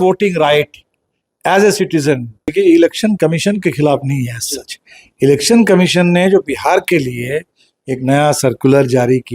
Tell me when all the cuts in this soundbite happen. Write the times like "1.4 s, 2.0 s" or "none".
2.5 s

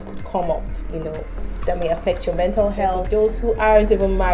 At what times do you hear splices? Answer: 3.0 s

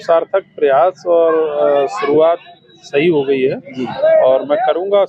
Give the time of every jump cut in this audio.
none

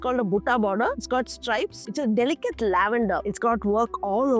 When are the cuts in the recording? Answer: 3.3 s

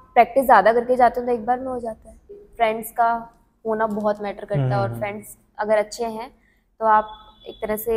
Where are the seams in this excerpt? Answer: 2.4 s

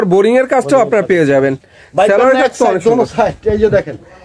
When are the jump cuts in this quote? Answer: none

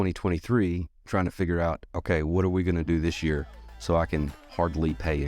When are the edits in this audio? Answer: none

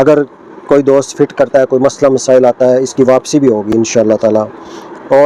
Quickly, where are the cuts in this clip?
none

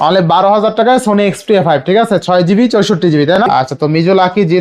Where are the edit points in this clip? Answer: 3.4 s

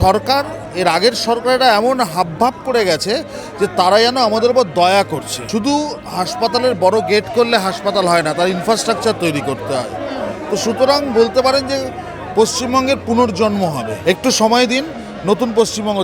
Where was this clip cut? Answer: 5.4 s, 13.9 s

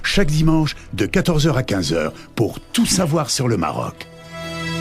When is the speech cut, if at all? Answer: 3.8 s

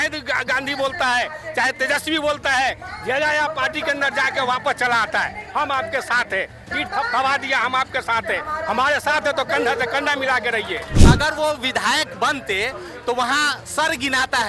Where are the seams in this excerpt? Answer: 10.9 s

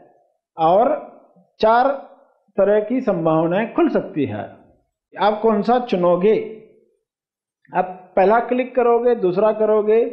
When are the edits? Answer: 5.1 s

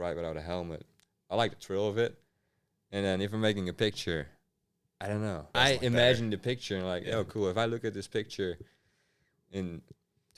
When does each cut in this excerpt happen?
5.5 s

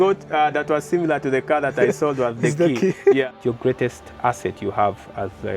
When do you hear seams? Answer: 3.3 s

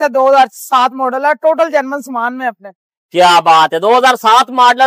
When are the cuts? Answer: none

